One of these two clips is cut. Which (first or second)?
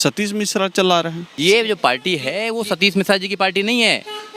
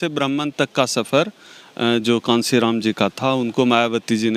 first